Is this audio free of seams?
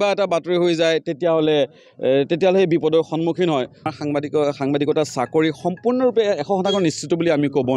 no; 1 cut; at 3.8 s

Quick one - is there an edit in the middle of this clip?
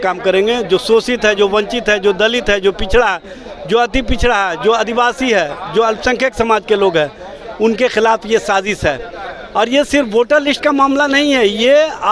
no; 0 cuts

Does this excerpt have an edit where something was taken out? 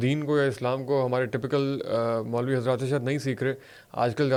no; 0 cuts

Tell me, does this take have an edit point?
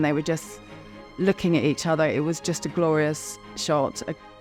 no; 0 cuts

